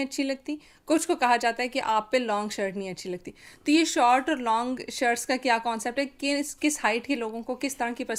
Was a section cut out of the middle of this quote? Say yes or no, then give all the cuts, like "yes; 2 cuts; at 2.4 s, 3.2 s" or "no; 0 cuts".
no; 0 cuts